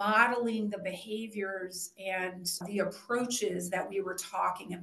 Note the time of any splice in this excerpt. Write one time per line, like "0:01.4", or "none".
0:02.6